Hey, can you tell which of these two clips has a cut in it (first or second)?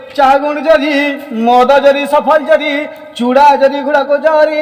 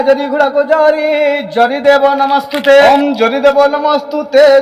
second